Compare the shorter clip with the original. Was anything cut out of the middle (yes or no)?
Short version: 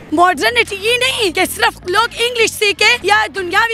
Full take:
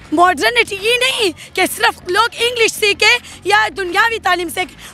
yes